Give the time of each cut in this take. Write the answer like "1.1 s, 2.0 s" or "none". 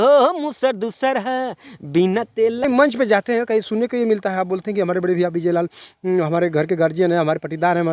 2.6 s